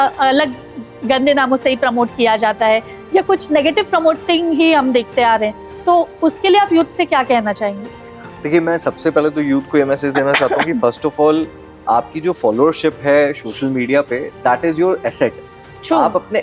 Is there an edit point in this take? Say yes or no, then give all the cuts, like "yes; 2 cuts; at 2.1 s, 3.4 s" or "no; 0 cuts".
no; 0 cuts